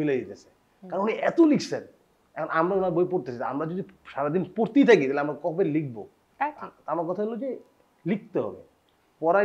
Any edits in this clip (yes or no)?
no